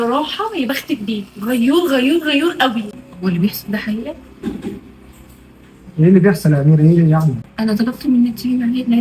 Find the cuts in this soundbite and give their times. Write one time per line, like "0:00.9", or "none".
0:03.0
0:07.5

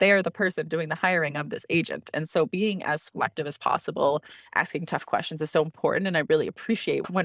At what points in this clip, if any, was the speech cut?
none

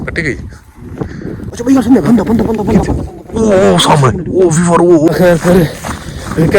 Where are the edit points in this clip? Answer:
0:01.4
0:05.1

